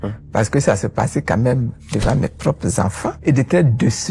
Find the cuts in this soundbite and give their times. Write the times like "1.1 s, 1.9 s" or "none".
3.2 s